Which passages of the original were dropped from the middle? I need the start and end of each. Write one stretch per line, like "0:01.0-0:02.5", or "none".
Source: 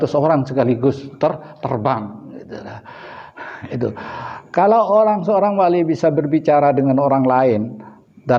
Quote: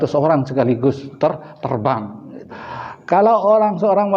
0:02.6-0:04.1

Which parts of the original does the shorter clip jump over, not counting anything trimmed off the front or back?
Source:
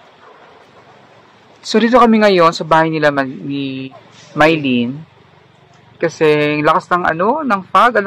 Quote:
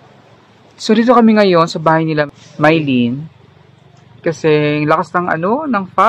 0:03.1-0:04.0

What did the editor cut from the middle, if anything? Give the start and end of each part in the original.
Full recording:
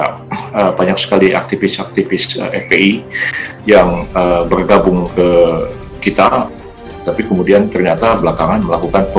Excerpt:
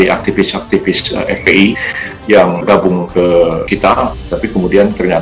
0:03.6-0:04.4
0:05.9-0:06.6

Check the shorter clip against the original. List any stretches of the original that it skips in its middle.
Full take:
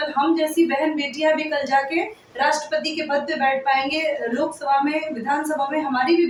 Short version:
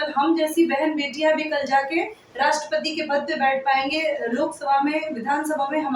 none

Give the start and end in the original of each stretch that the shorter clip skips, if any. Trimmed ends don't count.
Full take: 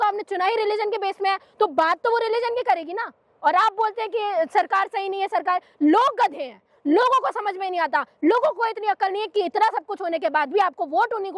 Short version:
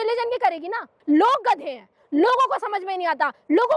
0:03.2-0:05.7

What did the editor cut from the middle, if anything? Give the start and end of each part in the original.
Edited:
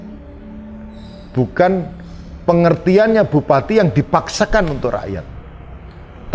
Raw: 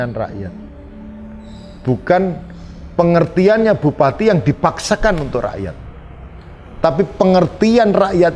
none

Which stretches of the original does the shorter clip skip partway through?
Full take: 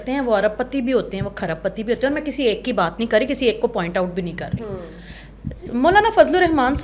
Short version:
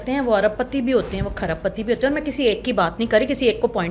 none

